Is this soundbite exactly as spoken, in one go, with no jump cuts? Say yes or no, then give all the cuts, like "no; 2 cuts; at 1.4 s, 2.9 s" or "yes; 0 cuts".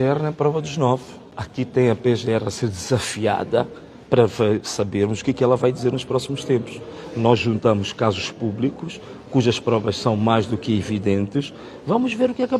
yes; 0 cuts